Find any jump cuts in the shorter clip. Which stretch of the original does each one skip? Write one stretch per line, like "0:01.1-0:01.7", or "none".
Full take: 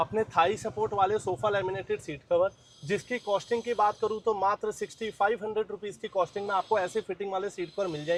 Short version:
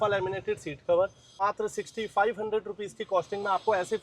0:02.8-0:04.4